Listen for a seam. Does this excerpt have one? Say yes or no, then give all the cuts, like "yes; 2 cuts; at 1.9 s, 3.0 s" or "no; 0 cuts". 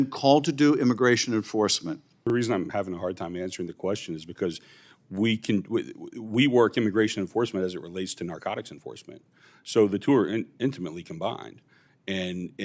yes; 1 cut; at 2.3 s